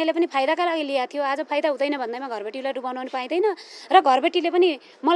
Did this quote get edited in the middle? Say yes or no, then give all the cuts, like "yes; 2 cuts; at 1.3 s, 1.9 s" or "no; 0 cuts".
no; 0 cuts